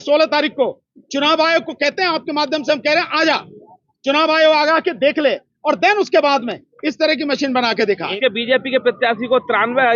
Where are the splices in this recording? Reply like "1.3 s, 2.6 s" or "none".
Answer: 8.1 s